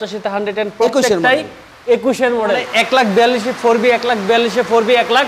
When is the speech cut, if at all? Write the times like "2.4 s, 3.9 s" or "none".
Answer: 2.7 s